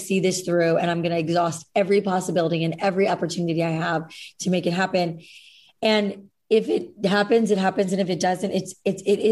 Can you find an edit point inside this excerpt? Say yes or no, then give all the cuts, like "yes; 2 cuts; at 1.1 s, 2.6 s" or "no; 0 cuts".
no; 0 cuts